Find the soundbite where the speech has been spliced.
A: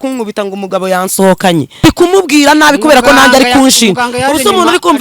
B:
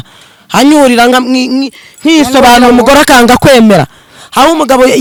A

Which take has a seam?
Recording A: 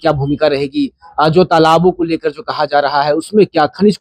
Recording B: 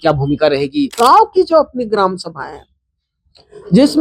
B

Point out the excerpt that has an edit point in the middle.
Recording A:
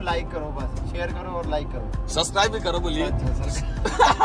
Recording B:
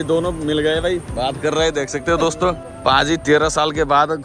B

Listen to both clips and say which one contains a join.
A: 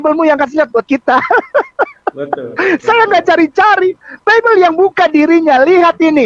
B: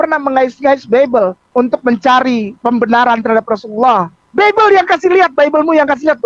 B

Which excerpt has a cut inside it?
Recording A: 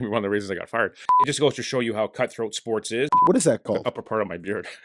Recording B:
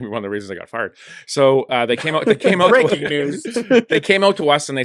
A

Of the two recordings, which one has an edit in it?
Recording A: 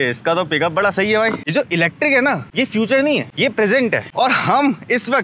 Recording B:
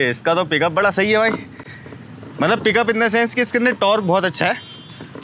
A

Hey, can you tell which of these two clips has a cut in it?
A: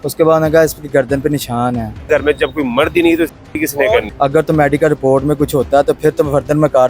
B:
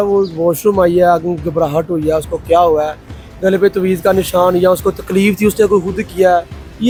A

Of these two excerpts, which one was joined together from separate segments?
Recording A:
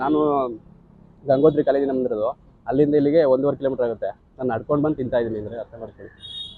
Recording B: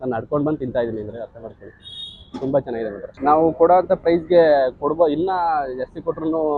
B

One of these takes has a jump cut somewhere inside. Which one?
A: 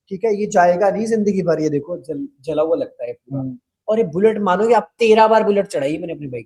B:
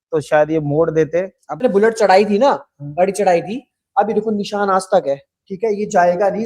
B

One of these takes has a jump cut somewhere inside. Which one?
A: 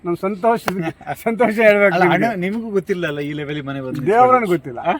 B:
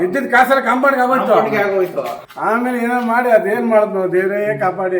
B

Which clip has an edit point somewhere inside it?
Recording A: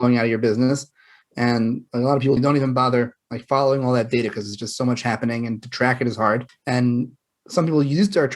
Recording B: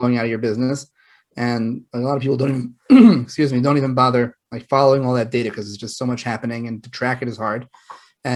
A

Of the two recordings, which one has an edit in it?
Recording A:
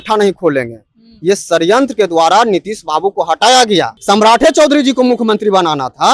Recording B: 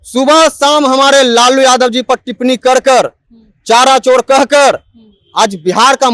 A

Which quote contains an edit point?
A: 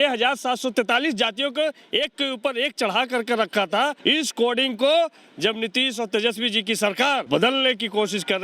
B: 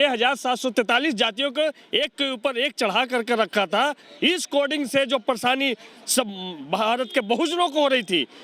A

